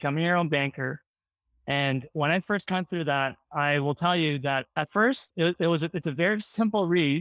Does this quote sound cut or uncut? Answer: uncut